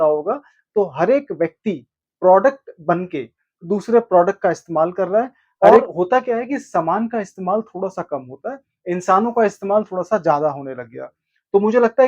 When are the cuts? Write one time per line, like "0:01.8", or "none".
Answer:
0:05.8